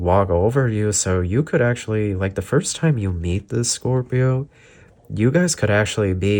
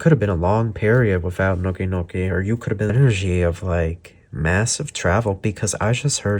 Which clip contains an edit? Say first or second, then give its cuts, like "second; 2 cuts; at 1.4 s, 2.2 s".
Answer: second; 1 cut; at 2.9 s